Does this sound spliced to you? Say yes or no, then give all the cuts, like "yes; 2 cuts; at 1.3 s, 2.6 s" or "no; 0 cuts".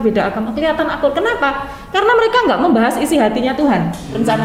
no; 0 cuts